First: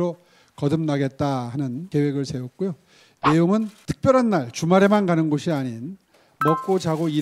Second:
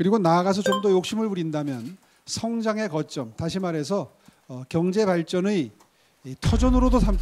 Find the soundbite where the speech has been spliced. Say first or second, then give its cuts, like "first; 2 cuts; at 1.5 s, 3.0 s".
first; 2 cuts; at 1.8 s, 3.8 s